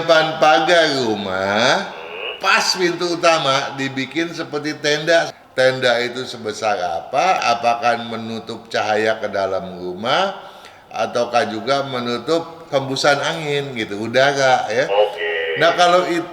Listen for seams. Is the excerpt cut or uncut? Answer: cut